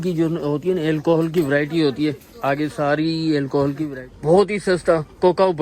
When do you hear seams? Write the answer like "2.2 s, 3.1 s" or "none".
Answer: 4.0 s